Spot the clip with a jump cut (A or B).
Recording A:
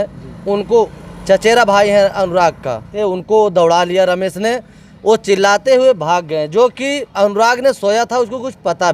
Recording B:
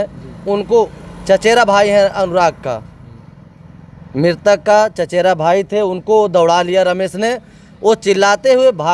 A